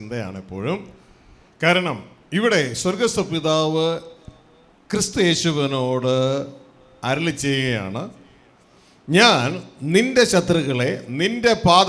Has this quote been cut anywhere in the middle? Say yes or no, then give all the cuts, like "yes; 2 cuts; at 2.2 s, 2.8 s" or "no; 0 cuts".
no; 0 cuts